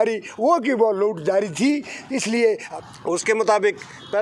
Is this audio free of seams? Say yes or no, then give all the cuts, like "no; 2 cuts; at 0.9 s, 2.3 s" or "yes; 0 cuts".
no; 1 cut; at 2.7 s